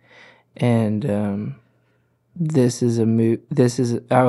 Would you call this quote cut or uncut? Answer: uncut